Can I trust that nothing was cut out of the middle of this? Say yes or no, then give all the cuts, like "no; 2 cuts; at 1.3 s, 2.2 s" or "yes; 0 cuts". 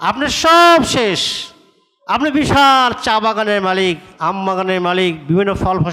yes; 0 cuts